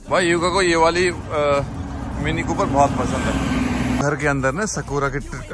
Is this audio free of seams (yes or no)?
no